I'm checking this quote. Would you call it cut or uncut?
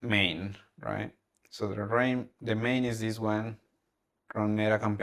uncut